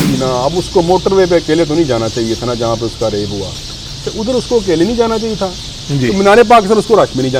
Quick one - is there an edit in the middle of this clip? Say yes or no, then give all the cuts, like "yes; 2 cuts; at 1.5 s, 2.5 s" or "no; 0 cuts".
no; 0 cuts